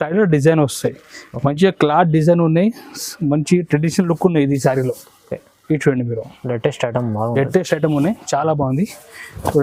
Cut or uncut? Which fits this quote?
uncut